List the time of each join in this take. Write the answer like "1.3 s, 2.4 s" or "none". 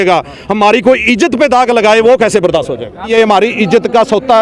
3.1 s